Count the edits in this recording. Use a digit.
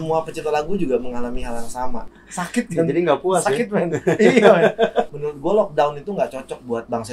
2